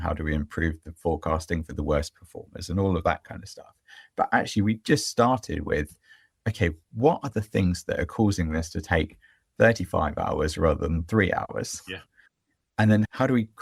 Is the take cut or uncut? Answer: uncut